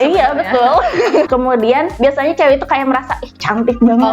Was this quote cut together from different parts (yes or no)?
yes